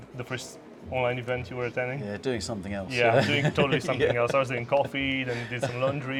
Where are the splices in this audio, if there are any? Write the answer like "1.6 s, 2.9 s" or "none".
none